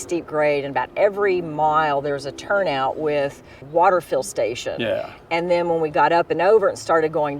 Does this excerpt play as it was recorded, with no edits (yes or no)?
yes